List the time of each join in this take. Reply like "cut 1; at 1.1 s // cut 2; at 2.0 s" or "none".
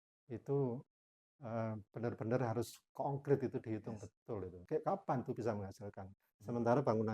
cut 1; at 4.6 s